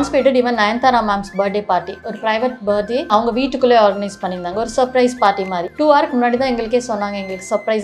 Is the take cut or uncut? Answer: cut